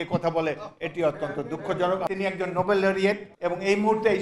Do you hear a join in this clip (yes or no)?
yes